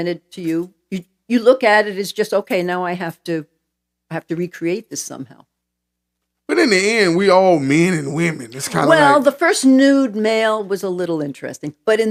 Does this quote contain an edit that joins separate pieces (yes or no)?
no